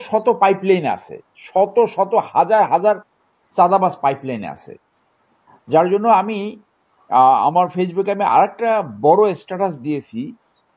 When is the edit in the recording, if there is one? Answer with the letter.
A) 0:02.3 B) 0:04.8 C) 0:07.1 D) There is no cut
D